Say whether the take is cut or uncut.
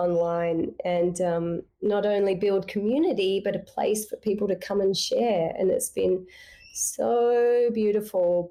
uncut